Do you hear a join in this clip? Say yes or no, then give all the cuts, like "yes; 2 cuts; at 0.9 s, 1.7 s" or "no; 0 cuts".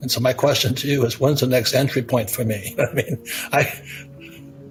no; 0 cuts